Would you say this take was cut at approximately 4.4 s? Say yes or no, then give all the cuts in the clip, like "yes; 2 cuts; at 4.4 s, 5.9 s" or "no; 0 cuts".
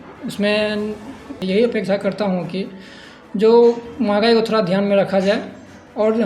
no; 1 cut; at 1.3 s